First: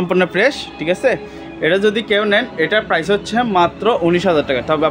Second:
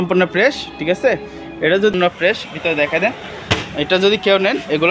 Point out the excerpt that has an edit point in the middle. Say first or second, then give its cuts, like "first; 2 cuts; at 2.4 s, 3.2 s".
second; 1 cut; at 1.9 s